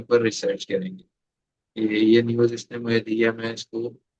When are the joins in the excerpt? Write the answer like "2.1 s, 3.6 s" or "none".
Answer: none